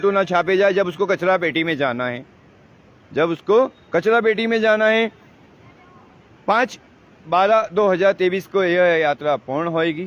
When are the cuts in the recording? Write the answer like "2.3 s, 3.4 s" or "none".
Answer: none